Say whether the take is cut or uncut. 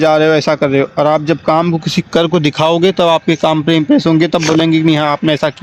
uncut